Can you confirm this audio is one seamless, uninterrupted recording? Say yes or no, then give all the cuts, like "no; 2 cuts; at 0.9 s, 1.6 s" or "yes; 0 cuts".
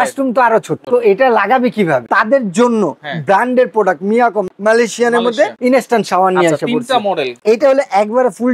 no; 5 cuts; at 0.8 s, 2.1 s, 4.5 s, 5.5 s, 7.4 s